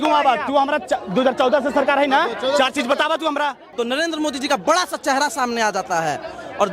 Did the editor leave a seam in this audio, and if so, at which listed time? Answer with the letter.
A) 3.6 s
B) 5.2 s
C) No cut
A